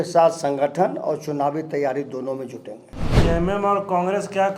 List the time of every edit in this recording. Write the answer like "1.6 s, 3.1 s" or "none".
3.1 s

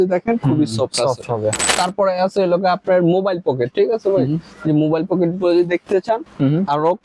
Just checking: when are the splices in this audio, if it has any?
1.7 s

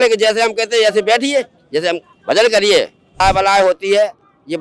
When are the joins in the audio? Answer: 3.2 s

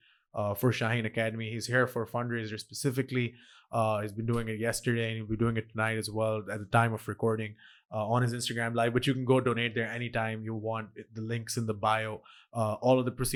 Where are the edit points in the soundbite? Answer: none

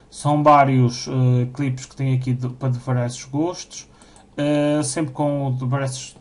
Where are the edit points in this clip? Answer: 3.7 s

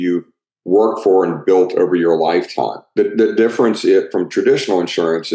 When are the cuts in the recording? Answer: 2.9 s

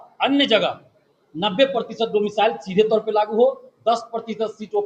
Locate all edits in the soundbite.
none

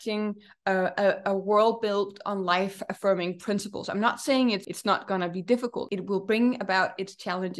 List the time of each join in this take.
4.7 s, 5.8 s

